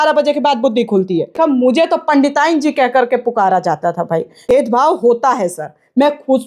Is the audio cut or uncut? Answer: cut